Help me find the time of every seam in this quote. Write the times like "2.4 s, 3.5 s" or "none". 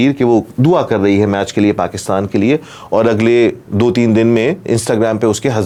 none